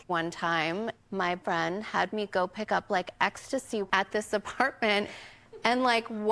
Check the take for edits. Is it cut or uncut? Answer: cut